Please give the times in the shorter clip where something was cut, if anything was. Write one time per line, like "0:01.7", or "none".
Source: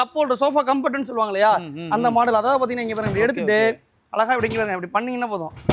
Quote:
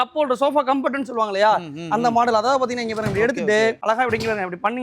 0:03.8

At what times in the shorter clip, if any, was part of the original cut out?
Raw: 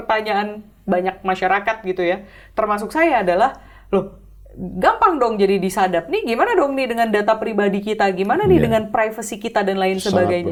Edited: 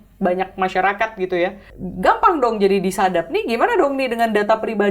0:01.7

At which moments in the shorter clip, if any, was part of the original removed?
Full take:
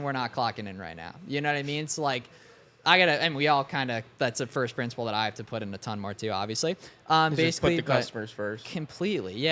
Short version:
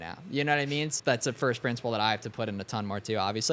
0:00.9

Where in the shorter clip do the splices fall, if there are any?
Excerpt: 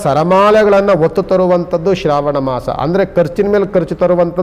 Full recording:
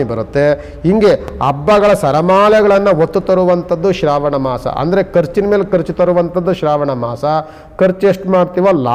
none

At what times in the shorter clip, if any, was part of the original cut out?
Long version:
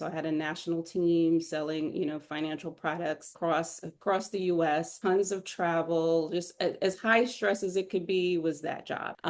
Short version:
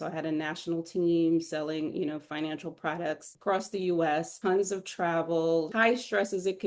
0:03.3
0:05.7

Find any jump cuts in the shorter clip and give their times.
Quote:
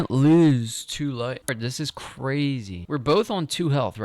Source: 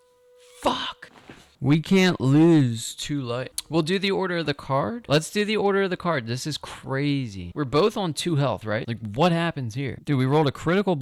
0:01.5

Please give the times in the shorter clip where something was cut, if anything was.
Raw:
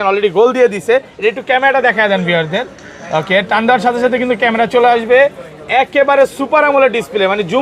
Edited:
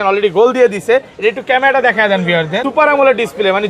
0:02.6

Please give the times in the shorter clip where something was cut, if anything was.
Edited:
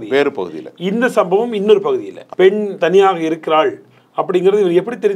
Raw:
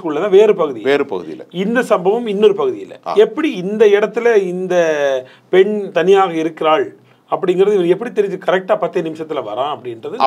0:02.2

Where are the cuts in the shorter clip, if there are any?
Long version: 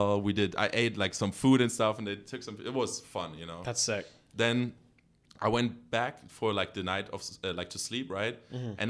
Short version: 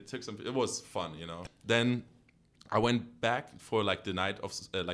0:01.4

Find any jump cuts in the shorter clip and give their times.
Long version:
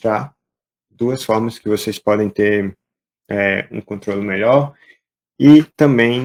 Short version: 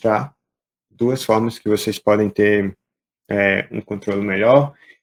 none

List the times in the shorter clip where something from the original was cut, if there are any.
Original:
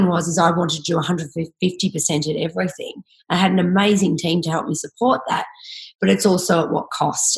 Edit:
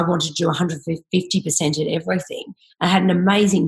none

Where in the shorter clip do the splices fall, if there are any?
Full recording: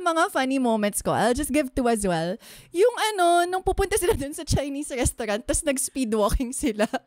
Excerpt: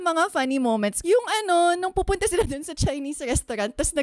0:01.0

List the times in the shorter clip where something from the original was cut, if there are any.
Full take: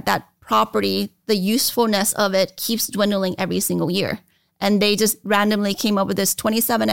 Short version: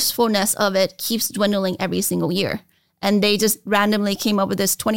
none

